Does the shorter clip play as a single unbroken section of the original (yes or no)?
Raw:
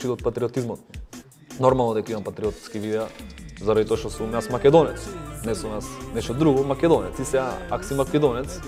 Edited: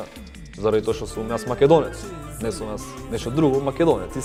yes